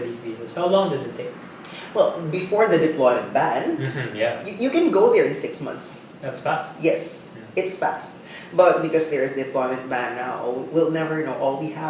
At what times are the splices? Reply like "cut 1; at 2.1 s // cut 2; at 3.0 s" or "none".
none